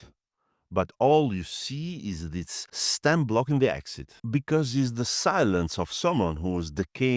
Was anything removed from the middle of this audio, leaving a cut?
no; 0 cuts

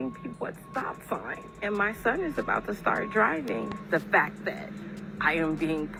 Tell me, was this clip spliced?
no; 0 cuts

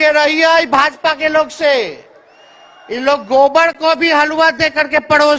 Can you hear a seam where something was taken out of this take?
no; 0 cuts

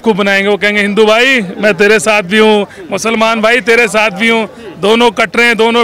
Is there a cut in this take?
no; 0 cuts

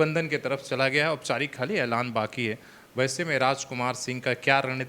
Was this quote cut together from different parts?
no; 0 cuts

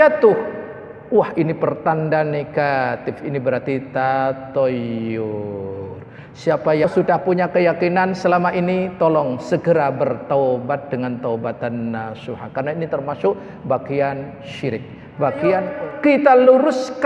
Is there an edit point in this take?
yes; 2 cuts; at 6.8 s, 15.7 s

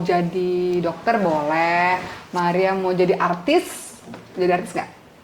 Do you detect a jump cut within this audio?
no; 0 cuts

